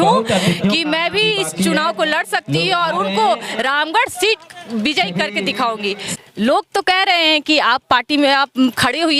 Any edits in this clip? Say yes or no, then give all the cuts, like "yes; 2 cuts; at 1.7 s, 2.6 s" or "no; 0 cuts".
yes; 1 cut; at 6.0 s